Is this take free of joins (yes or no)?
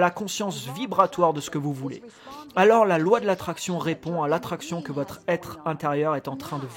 yes